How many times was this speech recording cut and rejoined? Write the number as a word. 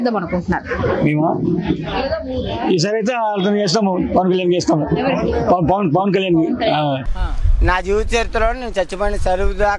one